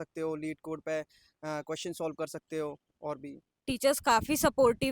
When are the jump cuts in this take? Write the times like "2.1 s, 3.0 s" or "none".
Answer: 3.5 s